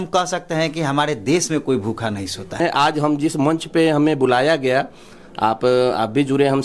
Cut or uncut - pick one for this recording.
cut